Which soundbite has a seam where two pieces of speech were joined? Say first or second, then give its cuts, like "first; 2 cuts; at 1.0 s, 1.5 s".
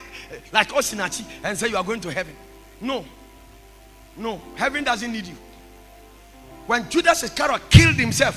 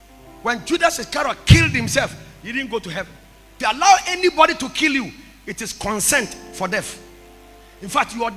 second; 1 cut; at 3.5 s